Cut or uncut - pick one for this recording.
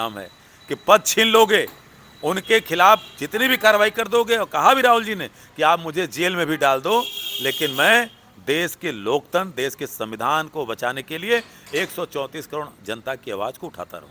uncut